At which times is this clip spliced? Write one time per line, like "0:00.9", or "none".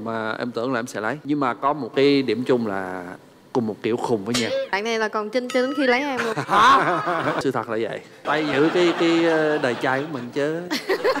0:01.2
0:04.7
0:07.4
0:08.2